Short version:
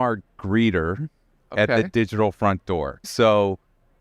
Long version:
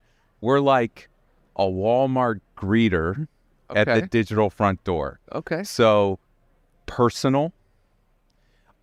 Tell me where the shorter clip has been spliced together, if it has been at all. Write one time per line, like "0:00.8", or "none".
0:03.0